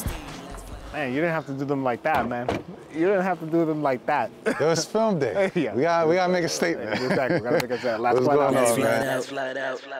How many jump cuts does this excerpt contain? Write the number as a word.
zero